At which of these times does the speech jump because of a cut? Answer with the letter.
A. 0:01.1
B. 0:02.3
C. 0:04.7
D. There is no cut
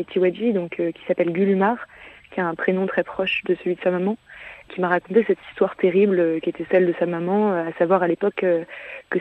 C